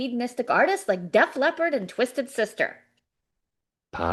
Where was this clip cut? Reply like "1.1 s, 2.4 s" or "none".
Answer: none

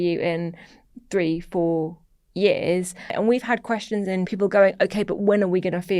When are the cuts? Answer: 3.1 s, 4.3 s

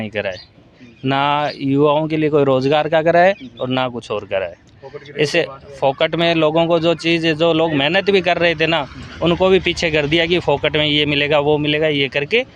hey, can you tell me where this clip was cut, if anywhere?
none

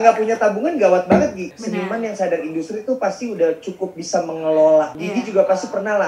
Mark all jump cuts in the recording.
1.5 s, 5.0 s

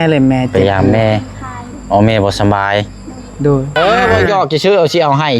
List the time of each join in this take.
3.7 s

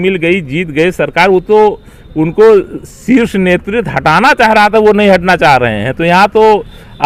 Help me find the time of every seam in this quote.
none

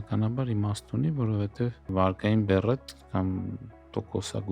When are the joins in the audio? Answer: 1.9 s

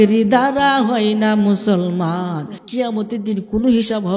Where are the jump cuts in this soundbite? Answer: 2.5 s

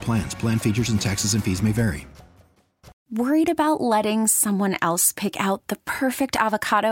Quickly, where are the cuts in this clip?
3.0 s

